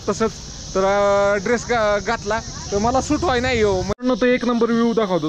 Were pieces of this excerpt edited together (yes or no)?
yes